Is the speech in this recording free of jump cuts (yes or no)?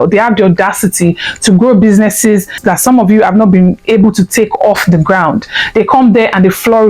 no